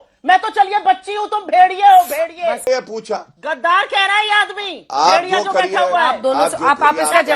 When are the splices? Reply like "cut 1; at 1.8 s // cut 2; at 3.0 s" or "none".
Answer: cut 1; at 2.7 s

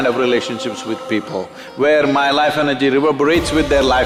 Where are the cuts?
none

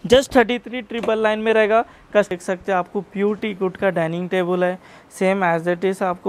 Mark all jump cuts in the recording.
cut 1; at 2.3 s

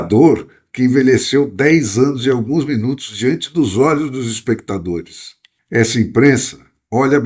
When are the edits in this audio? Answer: cut 1; at 5.5 s

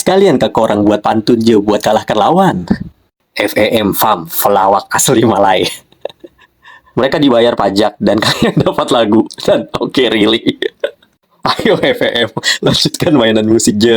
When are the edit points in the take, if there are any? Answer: cut 1; at 6.8 s

